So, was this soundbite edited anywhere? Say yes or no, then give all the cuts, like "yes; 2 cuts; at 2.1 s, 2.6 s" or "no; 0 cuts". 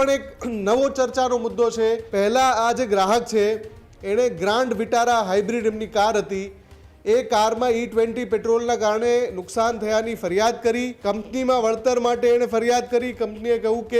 yes; 2 cuts; at 2.1 s, 10.9 s